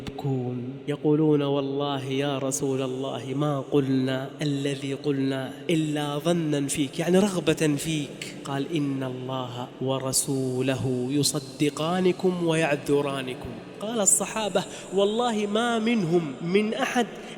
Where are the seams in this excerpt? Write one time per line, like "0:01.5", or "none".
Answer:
none